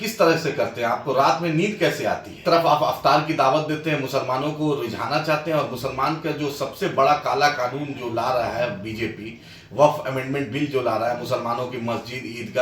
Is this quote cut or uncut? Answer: cut